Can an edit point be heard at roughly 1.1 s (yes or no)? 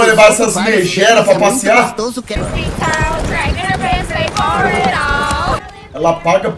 no